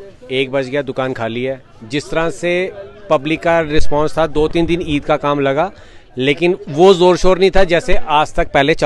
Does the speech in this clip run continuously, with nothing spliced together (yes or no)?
yes